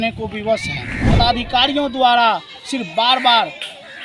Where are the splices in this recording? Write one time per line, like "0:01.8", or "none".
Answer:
0:01.0

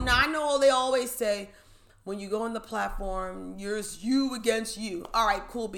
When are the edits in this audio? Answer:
none

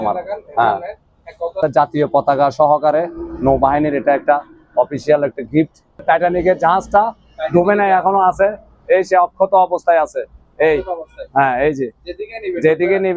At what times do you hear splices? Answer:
0:01.6
0:06.0

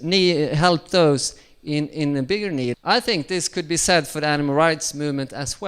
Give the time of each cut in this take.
0:02.7

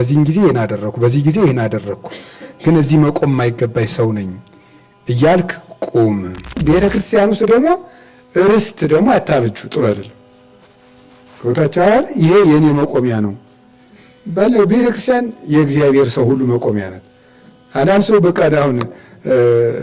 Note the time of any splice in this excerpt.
0:06.6

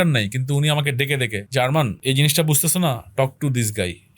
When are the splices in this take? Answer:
0:01.4
0:02.0

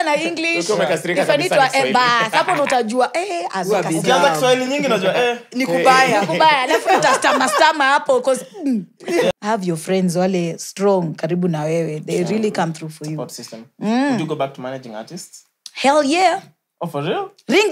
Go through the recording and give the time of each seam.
0:09.3

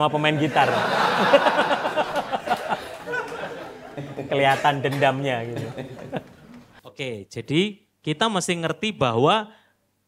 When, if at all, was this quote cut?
0:06.7

